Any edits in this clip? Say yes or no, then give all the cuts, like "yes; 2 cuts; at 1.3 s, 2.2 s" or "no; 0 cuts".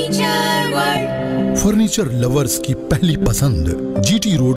no; 0 cuts